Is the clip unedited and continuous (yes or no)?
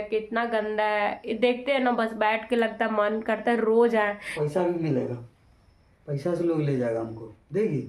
no